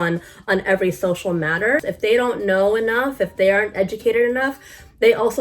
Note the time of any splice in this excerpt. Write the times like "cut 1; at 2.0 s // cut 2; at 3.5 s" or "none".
cut 1; at 1.8 s

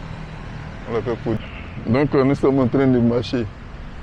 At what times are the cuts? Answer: cut 1; at 1.4 s

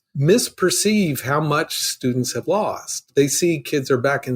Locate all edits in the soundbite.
cut 1; at 3.1 s

